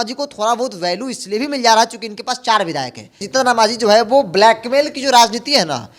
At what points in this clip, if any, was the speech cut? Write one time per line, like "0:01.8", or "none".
0:03.1